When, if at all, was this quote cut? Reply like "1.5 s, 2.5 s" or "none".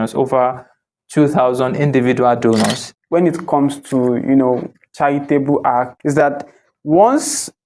2.9 s, 5.9 s